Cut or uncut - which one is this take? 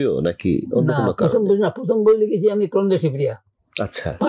uncut